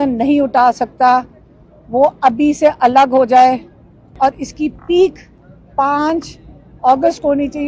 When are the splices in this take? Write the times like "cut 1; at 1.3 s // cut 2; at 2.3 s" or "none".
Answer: cut 1; at 4.2 s